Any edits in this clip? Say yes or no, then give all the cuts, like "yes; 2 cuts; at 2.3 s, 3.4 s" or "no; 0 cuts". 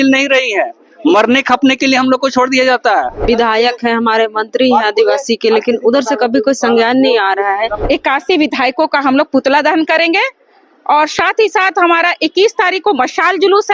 yes; 2 cuts; at 3.2 s, 7.7 s